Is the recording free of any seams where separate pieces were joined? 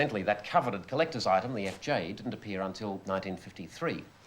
no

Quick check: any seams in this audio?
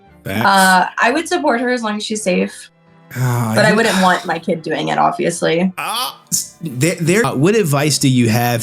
yes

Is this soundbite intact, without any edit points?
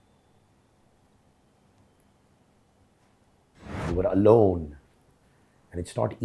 no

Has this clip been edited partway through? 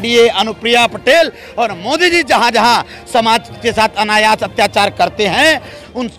no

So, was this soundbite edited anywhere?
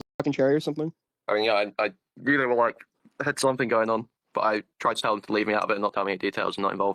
no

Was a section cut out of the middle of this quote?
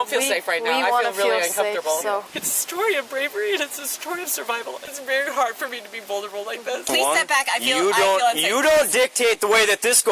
yes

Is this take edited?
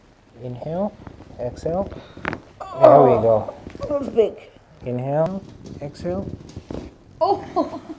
yes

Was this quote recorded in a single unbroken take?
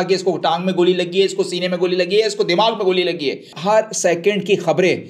no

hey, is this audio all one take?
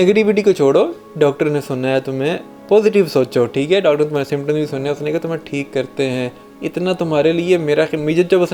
yes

